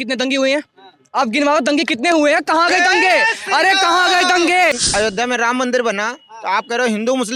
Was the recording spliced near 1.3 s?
no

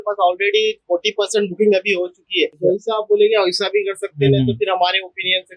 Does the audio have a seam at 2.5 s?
yes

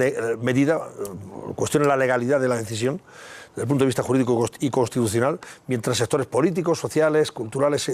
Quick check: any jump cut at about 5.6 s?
no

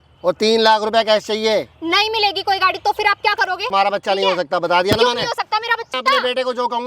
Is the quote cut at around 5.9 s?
yes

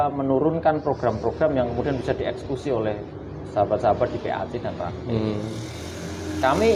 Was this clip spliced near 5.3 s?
no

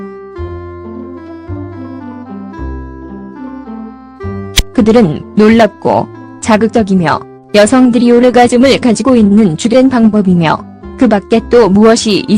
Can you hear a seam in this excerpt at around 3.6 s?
yes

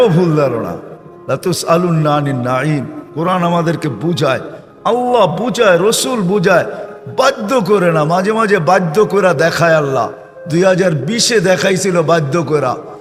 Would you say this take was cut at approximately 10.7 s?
no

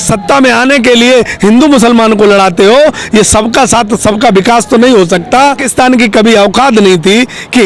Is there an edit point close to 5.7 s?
yes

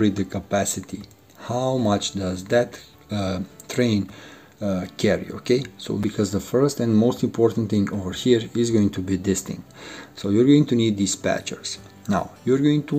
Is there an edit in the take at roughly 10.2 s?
no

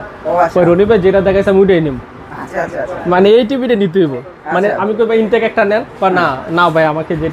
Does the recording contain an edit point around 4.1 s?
no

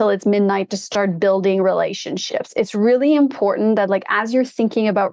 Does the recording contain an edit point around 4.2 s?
no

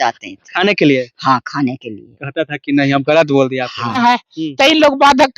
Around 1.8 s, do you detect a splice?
no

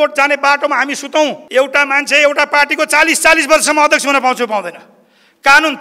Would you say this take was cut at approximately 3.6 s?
no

